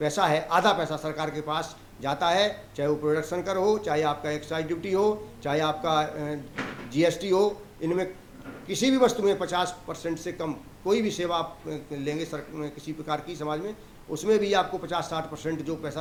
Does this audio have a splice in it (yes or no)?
no